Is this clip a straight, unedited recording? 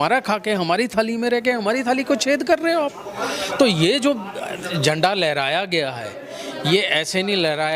yes; 0 cuts

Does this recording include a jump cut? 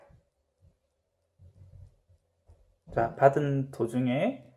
no; 0 cuts

